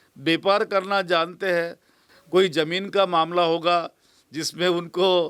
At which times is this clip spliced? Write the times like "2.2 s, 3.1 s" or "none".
2.0 s